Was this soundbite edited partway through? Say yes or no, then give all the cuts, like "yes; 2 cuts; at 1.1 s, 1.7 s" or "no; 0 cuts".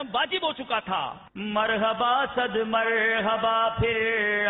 yes; 1 cut; at 1.3 s